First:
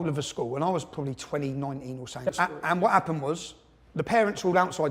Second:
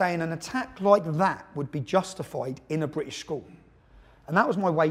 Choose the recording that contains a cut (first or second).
first